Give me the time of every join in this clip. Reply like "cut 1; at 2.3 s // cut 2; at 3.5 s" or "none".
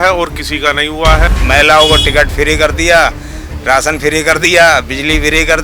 cut 1; at 1.3 s